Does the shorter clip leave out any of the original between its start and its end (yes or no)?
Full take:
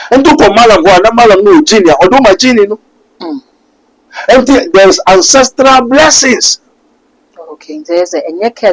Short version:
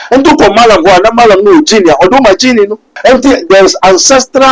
yes